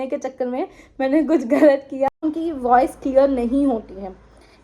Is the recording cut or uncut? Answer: cut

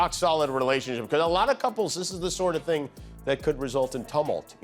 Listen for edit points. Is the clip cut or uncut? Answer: uncut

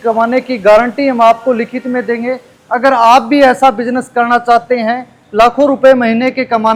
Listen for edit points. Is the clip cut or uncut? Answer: uncut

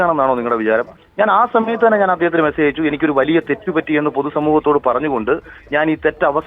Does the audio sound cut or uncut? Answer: cut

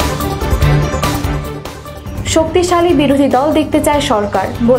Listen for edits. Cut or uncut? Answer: cut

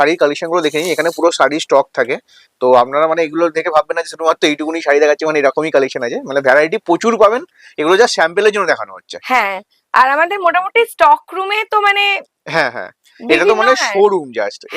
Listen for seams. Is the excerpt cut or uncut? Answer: uncut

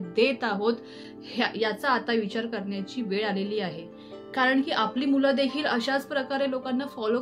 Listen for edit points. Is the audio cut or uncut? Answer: uncut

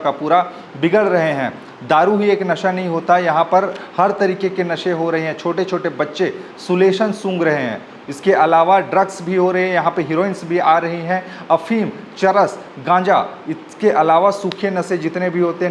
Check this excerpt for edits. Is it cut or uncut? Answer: uncut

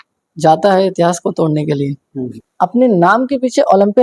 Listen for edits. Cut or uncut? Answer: cut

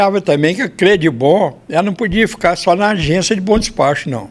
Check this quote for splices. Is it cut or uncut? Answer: uncut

